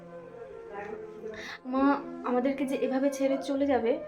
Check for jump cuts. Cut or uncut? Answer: cut